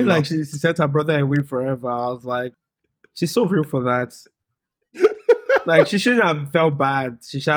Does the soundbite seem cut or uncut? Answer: uncut